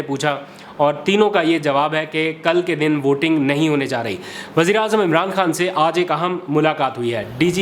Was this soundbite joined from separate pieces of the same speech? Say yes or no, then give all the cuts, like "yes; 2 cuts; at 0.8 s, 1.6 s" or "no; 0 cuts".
no; 0 cuts